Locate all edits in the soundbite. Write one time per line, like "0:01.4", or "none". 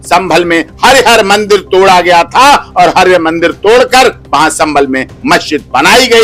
none

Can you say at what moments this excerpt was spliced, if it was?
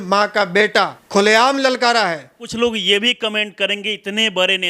0:01.0
0:02.5

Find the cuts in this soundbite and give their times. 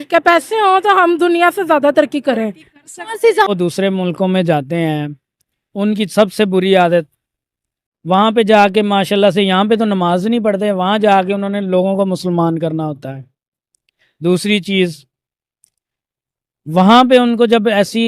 0:03.5

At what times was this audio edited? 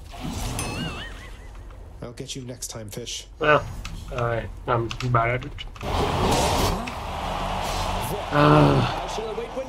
0:03.2
0:05.8

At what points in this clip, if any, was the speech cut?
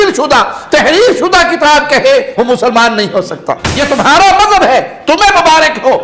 0:03.7

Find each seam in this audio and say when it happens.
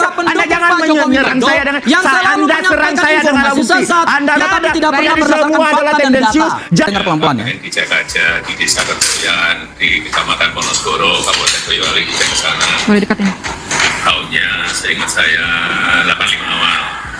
0:04.4
0:06.9

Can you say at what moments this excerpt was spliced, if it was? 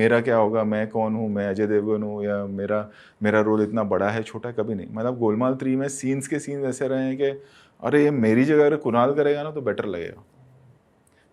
none

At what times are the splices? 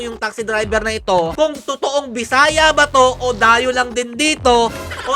0:01.3

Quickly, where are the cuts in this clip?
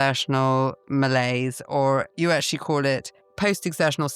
0:03.2

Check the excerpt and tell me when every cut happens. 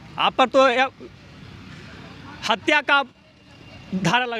none

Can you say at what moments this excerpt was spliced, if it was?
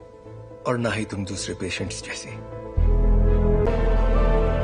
0:03.7

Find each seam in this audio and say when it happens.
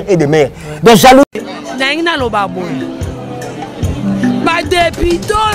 0:01.2

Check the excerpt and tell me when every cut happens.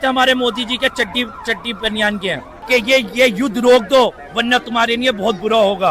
0:02.5

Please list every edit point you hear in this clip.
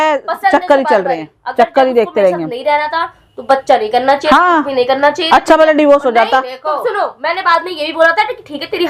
none

